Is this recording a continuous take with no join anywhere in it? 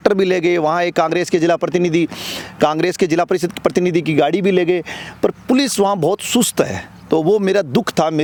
yes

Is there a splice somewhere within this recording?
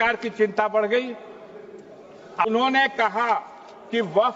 yes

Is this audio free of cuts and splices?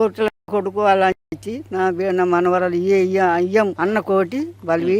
no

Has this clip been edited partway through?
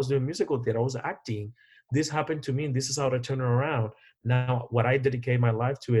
no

